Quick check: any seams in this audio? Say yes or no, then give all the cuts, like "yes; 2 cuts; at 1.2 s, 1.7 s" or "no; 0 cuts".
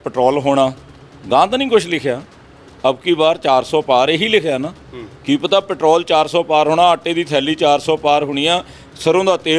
no; 0 cuts